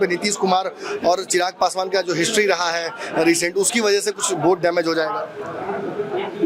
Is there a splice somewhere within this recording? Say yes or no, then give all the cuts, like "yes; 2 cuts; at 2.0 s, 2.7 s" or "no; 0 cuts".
no; 0 cuts